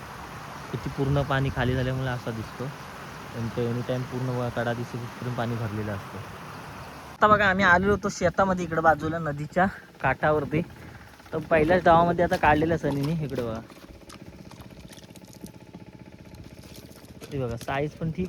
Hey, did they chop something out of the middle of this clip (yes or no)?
yes